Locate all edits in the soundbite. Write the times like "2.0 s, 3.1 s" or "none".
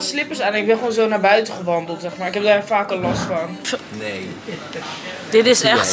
3.6 s